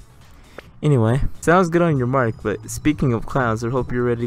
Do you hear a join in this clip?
yes; 1 cut; at 1.3 s

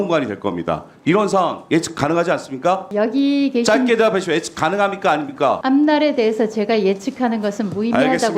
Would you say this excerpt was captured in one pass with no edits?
no; 2 cuts; at 2.9 s, 5.6 s

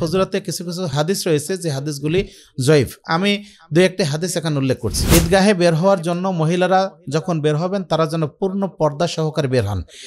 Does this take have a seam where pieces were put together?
yes; 2 cuts; at 0.9 s, 4.9 s

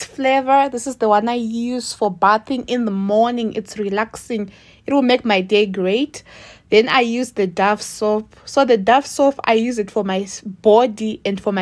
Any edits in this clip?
no; 0 cuts

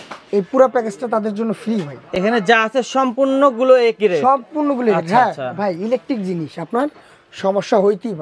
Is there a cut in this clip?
no; 0 cuts

